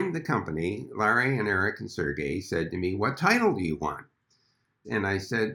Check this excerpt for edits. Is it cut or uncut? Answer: uncut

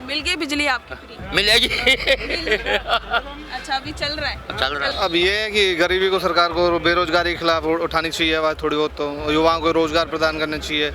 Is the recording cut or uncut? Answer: cut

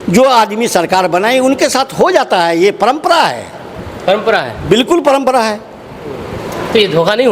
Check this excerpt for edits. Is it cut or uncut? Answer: uncut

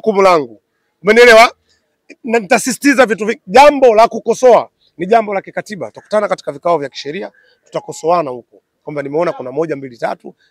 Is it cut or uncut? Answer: uncut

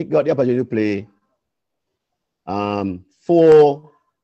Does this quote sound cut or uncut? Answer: uncut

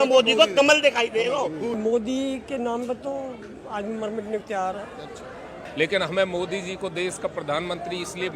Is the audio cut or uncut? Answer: cut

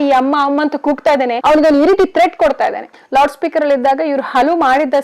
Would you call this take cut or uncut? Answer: cut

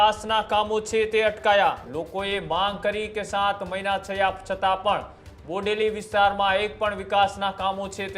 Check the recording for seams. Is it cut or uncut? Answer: cut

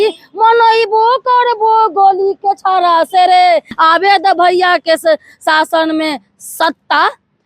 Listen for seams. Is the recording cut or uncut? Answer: cut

